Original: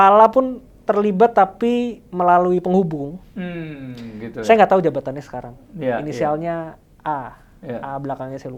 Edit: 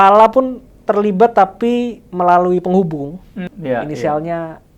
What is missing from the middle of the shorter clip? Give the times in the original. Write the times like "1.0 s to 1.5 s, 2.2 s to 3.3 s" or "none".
3.5 s to 5.6 s